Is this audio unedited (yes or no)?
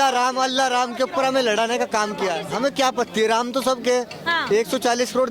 no